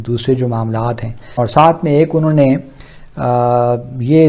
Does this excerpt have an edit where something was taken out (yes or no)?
no